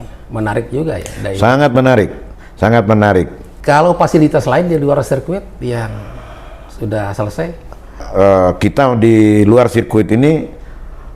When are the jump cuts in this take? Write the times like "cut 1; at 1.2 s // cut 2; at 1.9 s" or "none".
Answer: cut 1; at 3.4 s // cut 2; at 8.0 s

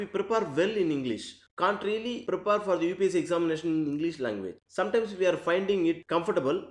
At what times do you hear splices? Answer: cut 1; at 1.4 s

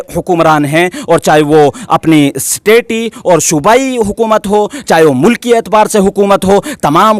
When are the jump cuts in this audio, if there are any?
none

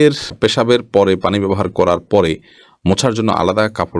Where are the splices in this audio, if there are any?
none

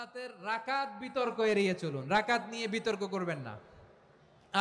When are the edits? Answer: none

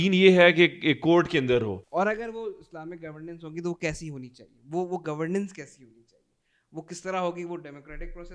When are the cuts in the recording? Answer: cut 1; at 1.8 s

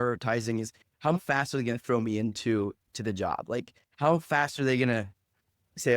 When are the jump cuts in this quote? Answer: cut 1; at 1.2 s // cut 2; at 2.9 s

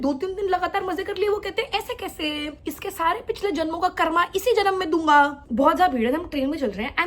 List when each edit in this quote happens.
cut 1; at 2.5 s // cut 2; at 5.5 s

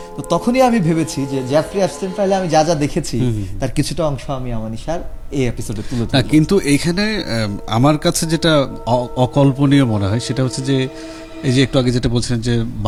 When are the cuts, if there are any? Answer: none

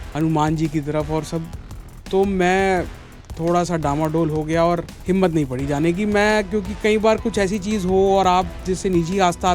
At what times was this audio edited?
cut 1; at 4.9 s

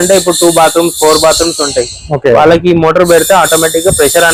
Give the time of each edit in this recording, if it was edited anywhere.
none

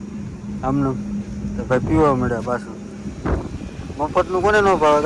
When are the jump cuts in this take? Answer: none

